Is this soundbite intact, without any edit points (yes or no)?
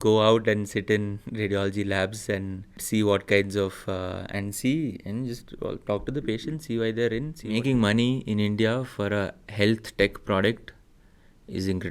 no